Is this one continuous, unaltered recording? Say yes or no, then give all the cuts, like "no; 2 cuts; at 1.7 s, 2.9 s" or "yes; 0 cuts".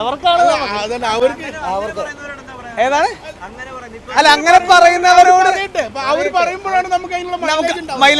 yes; 0 cuts